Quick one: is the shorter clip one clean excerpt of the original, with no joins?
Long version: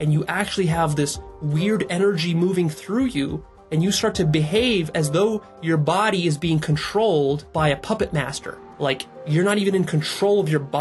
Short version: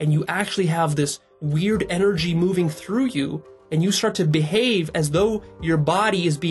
yes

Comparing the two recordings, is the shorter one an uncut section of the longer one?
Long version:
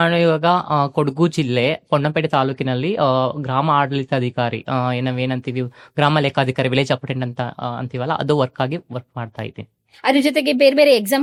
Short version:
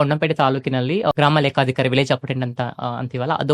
no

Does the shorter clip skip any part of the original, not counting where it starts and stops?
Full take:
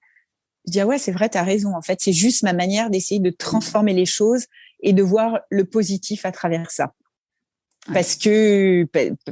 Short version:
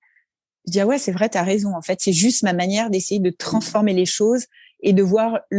no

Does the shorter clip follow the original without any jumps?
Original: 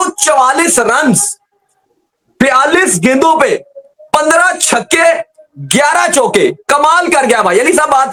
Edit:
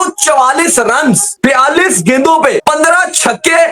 no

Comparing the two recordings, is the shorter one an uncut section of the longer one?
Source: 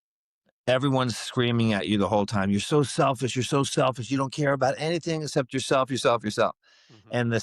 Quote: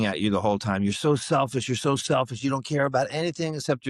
yes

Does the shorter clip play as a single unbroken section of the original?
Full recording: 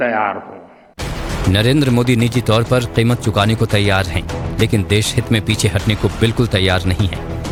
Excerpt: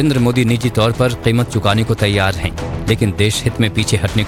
yes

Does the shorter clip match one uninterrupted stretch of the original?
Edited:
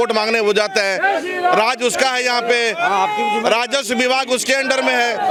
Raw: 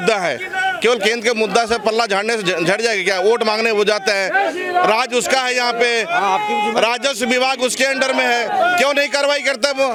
yes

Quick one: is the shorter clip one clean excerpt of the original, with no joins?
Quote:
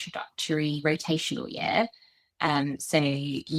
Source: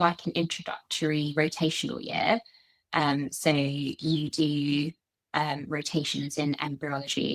yes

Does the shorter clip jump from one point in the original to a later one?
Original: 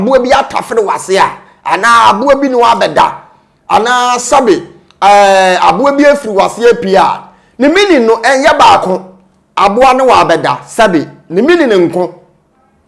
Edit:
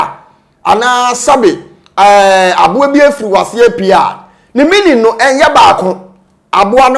no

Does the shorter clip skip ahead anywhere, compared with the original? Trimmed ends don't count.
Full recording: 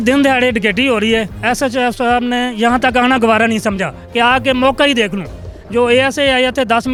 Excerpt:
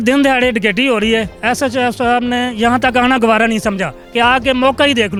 no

